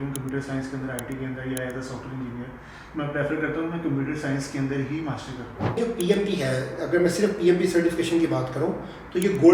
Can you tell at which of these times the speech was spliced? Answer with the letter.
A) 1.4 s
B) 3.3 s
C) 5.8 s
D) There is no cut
C